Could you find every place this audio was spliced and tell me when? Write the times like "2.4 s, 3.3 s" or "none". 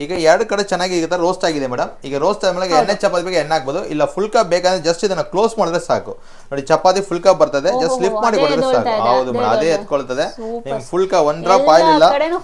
none